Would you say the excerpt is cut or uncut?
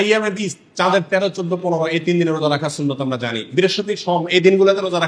uncut